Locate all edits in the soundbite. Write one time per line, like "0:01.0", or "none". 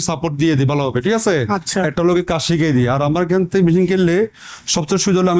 none